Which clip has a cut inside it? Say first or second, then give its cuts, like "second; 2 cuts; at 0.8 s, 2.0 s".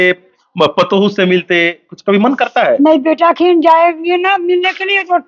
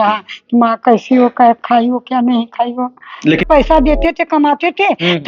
second; 1 cut; at 3.4 s